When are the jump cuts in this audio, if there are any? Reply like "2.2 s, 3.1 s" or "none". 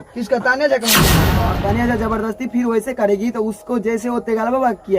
1.3 s